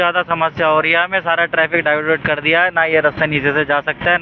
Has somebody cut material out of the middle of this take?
no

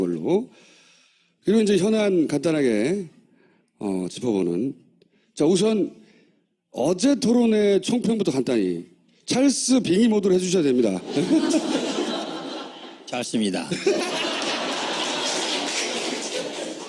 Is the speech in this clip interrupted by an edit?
yes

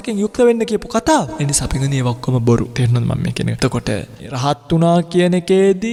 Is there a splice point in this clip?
no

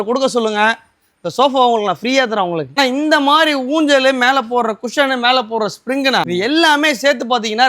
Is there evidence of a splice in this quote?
yes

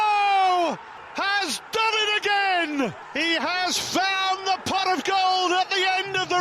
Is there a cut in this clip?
yes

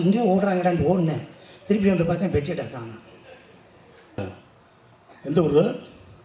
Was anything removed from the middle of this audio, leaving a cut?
yes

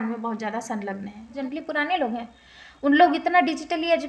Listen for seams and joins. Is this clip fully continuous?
no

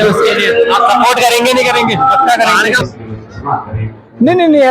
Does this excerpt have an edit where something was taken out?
yes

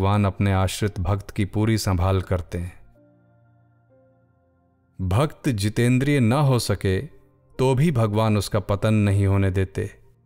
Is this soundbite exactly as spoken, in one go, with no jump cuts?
no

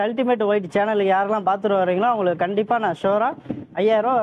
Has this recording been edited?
no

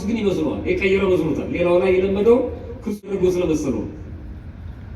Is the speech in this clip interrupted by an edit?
yes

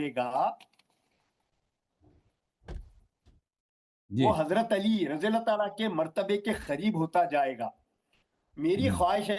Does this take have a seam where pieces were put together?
no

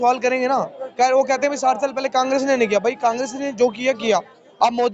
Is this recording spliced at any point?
no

